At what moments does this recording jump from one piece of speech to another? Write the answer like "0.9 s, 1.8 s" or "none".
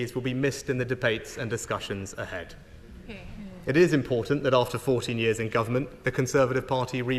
none